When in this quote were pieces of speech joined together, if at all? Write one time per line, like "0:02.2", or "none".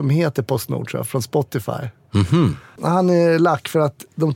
0:02.8